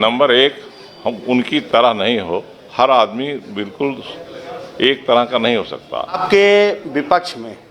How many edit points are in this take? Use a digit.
1